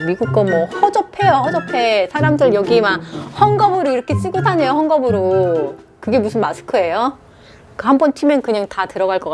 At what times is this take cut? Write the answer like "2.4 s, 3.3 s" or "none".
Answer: none